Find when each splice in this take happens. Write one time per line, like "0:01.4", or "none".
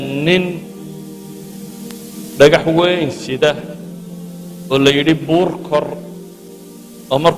0:01.0
0:02.4